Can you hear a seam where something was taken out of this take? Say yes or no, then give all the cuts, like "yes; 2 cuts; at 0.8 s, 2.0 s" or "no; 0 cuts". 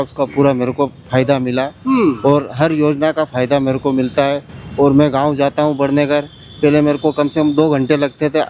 no; 0 cuts